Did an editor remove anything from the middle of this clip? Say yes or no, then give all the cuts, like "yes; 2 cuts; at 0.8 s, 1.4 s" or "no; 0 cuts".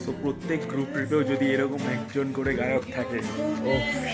no; 0 cuts